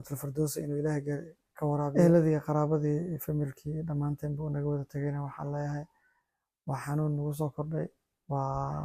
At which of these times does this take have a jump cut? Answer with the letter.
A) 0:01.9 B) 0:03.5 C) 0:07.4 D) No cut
A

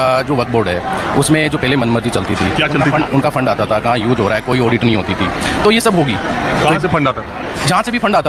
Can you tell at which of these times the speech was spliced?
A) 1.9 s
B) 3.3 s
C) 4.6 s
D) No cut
D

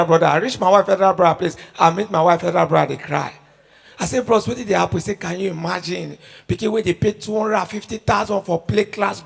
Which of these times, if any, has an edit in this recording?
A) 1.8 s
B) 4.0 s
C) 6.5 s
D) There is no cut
D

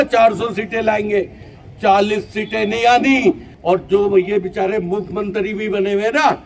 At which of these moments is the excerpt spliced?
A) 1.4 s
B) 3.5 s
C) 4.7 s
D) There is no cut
B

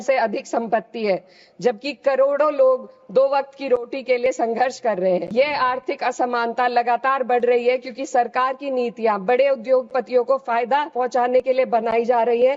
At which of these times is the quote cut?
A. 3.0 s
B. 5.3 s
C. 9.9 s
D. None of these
B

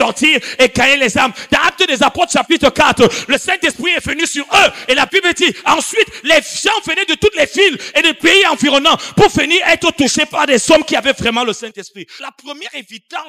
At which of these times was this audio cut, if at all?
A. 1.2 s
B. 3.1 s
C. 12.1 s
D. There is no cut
C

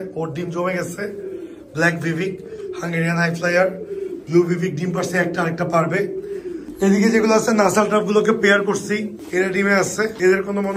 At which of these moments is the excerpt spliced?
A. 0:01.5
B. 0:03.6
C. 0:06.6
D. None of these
C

